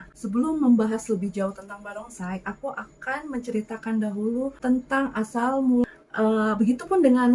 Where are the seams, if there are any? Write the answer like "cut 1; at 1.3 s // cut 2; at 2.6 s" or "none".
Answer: cut 1; at 5.8 s